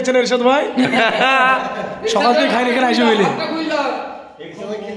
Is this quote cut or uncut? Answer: uncut